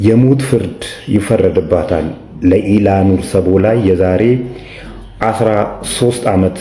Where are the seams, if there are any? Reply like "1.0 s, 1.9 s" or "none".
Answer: none